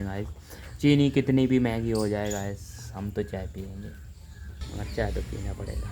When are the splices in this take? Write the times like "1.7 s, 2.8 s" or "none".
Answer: 4.5 s